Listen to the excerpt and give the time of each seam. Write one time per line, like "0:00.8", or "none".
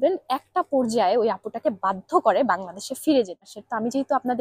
0:03.5